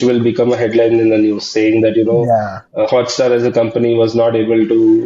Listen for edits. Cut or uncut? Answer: uncut